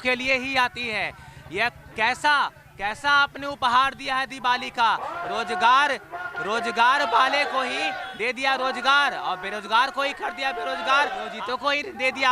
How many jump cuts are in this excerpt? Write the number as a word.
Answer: one